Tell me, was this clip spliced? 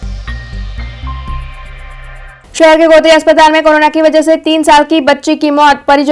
yes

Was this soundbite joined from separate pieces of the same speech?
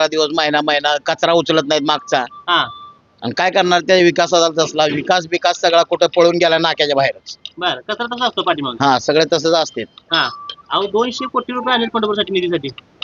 no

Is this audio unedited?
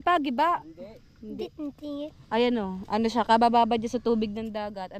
yes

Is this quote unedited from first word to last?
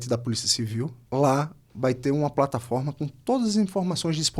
no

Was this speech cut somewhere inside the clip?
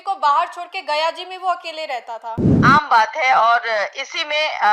yes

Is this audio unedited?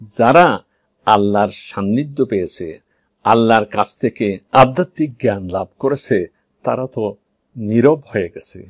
yes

